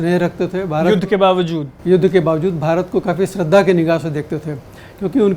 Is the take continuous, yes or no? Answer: yes